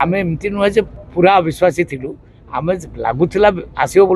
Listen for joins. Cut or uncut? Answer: cut